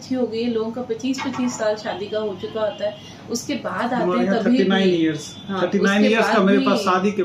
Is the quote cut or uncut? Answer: uncut